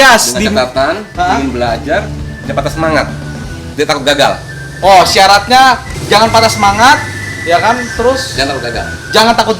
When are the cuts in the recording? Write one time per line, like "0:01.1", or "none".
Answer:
0:05.9